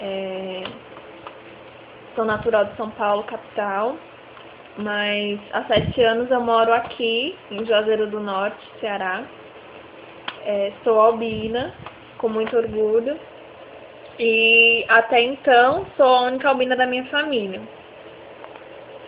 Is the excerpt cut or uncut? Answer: cut